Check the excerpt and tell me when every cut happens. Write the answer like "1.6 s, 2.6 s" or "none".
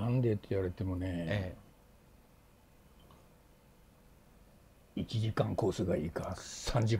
none